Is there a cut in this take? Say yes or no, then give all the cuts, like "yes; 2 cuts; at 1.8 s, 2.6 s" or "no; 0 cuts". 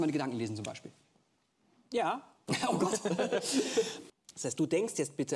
yes; 1 cut; at 4.0 s